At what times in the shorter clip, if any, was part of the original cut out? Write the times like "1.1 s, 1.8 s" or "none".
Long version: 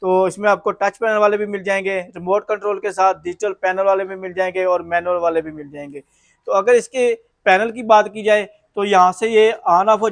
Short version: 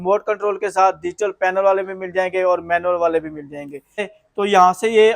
4.1 s